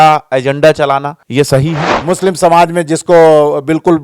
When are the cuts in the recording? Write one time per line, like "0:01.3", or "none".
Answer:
0:01.2
0:01.9